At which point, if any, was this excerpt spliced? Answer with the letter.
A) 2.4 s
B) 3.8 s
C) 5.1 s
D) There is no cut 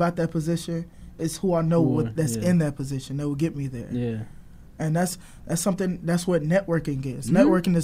D